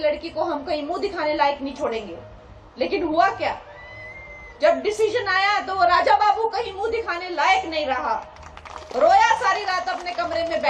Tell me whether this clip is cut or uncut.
uncut